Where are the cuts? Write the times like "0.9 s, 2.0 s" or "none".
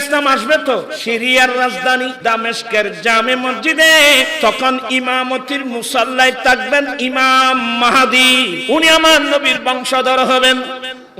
0.9 s, 2.1 s, 4.3 s, 8.6 s